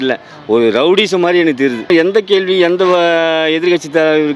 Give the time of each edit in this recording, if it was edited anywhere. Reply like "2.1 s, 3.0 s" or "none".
1.9 s